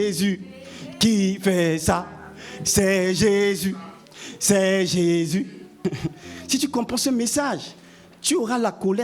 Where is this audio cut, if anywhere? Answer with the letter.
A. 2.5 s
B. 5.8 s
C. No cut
B